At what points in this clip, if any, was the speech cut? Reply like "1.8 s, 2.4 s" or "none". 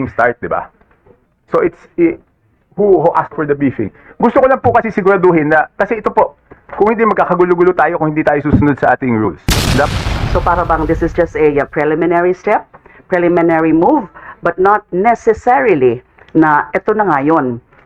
9.9 s

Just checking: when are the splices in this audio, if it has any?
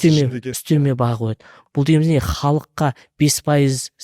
1.5 s

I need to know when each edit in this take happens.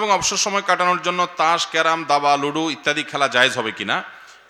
none

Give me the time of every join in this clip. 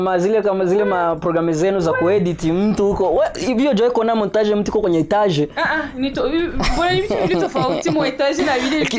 none

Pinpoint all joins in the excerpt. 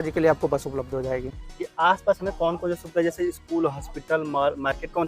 1.4 s

